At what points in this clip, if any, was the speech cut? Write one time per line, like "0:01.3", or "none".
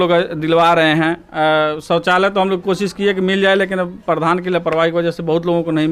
none